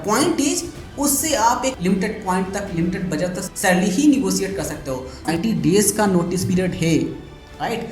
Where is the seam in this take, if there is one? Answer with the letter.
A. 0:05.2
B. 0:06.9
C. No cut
A